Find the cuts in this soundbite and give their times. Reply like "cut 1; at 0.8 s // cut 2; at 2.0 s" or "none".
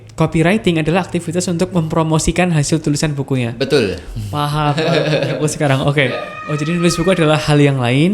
none